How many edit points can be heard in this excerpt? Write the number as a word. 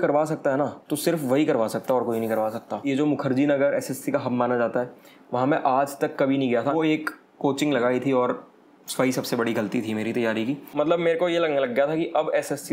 three